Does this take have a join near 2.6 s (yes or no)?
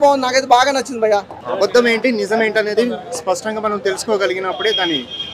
no